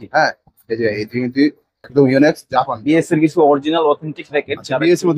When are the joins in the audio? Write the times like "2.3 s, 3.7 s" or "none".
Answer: 2.8 s

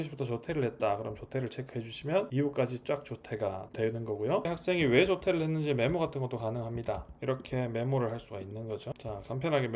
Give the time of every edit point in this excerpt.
4.5 s

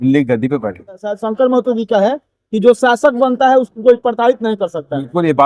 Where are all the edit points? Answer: 1.2 s

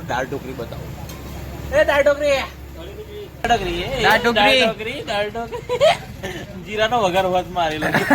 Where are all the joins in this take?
3.5 s

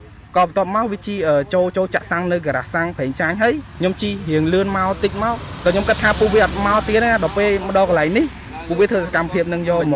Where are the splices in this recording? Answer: 3.7 s, 5.5 s

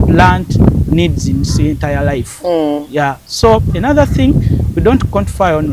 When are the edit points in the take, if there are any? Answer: none

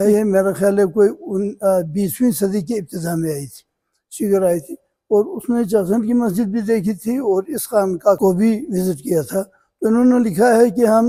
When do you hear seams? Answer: none

